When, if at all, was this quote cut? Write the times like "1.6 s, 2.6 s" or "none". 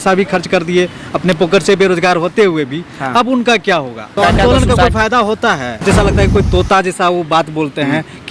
4.2 s, 5.8 s